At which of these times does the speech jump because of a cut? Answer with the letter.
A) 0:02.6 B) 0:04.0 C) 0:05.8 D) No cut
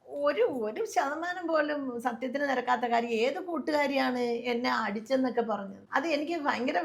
C